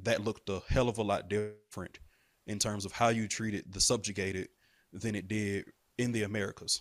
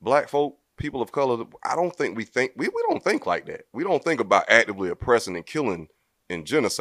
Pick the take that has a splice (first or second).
first